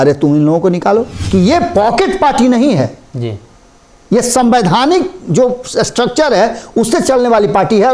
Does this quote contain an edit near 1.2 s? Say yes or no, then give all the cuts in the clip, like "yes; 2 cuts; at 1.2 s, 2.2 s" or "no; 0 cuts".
yes; 1 cut; at 1.2 s